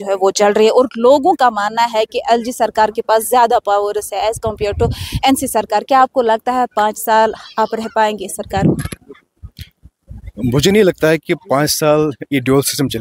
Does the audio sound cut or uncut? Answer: uncut